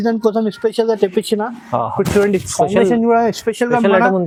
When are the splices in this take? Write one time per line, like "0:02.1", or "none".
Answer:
none